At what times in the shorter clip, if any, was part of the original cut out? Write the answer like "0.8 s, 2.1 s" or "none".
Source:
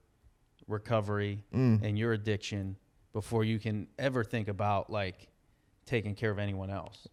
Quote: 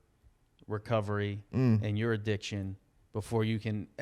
none